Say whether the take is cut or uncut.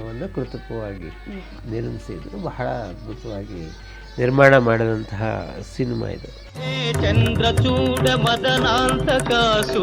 uncut